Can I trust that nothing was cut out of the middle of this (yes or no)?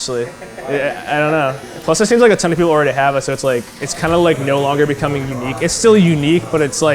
no